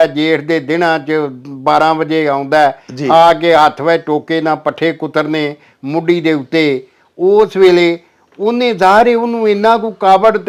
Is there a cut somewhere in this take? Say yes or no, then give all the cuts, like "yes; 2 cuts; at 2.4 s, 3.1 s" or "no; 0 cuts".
no; 0 cuts